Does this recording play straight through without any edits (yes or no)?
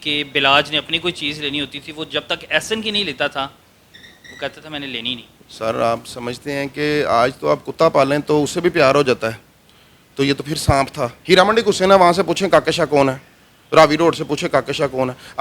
no